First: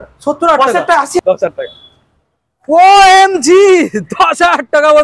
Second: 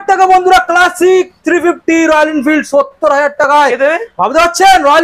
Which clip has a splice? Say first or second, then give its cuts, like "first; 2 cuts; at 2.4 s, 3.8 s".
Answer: first; 1 cut; at 1.2 s